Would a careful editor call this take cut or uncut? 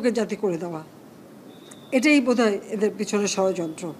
uncut